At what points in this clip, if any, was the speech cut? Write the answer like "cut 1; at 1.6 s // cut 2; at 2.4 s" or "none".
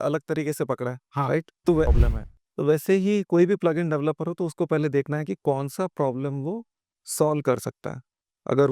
cut 1; at 1.9 s